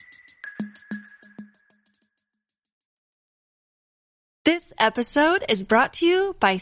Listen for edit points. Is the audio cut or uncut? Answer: uncut